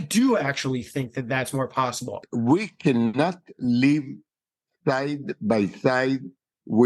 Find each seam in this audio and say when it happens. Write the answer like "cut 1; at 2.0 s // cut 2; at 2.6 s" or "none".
cut 1; at 2.2 s